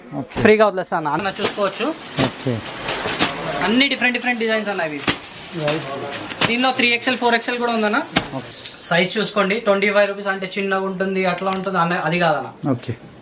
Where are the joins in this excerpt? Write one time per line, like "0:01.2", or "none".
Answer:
0:01.2
0:08.6